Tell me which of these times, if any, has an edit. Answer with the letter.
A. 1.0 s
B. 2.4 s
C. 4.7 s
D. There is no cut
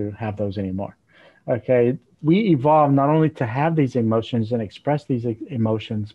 D